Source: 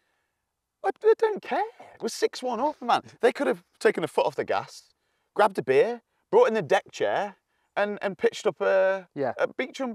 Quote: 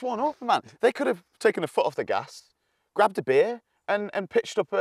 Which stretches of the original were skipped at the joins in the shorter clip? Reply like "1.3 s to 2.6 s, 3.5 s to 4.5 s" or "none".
6.1 s to 7.6 s